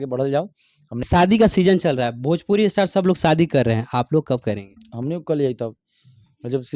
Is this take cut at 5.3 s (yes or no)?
no